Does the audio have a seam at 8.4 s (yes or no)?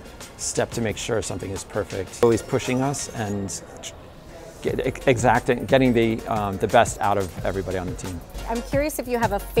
yes